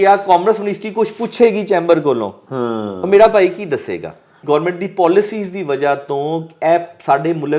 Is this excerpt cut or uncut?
cut